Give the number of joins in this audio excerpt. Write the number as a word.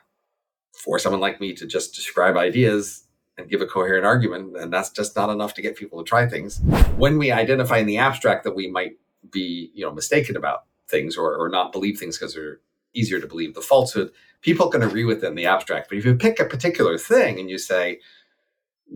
two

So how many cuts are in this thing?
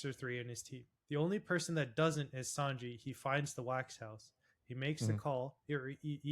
one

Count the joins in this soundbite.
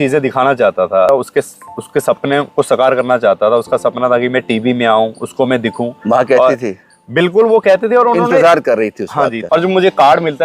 two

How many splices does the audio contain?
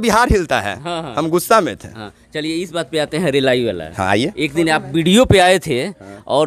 zero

